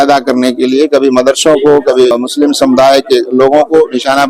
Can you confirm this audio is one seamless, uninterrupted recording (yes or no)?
no